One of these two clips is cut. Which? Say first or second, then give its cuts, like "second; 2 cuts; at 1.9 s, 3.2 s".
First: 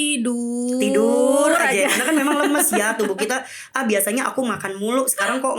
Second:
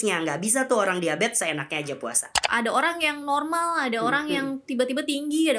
second; 1 cut; at 2.5 s